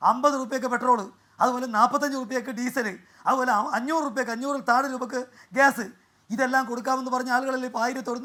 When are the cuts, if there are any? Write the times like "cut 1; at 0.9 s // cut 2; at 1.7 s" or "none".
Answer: none